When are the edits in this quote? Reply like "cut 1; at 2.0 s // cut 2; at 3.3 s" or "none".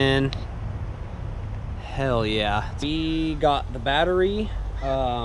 cut 1; at 2.8 s